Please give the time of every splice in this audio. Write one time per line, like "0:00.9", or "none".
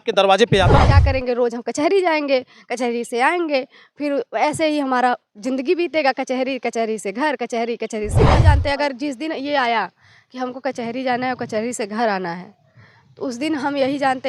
0:00.9
0:08.4

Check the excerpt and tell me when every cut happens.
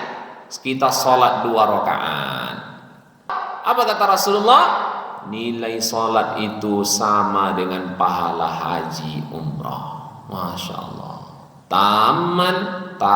0:03.4

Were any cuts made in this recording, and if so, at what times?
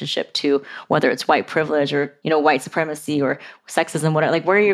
0:02.2

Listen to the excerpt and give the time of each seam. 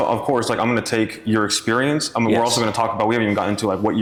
none

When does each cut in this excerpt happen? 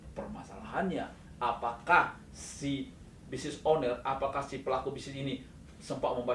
none

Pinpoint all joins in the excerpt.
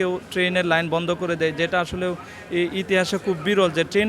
none

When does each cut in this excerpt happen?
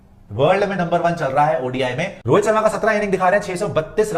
0:02.1

